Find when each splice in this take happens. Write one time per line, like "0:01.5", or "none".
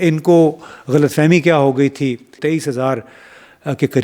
0:02.4